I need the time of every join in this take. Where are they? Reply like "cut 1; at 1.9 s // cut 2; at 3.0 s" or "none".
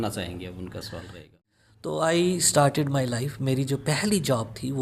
cut 1; at 1.4 s